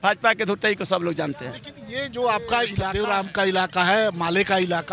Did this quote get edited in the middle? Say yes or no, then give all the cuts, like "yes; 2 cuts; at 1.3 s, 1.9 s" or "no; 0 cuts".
yes; 1 cut; at 2.8 s